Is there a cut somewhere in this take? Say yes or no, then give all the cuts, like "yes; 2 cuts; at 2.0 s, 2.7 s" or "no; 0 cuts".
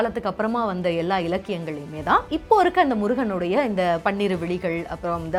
no; 0 cuts